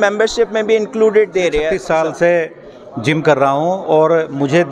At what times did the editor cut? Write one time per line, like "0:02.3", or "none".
0:01.8